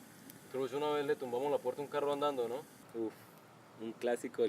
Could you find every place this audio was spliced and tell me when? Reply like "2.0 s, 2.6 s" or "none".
2.8 s